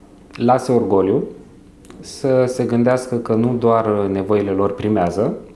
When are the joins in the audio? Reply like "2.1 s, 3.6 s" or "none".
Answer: none